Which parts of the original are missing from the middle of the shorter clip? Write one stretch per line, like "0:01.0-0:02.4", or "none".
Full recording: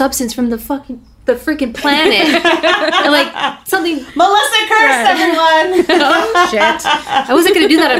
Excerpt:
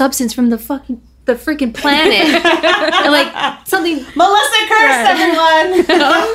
none